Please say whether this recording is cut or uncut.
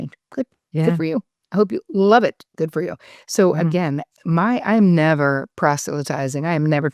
uncut